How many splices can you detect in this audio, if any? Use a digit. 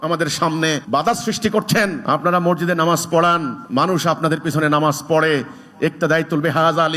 3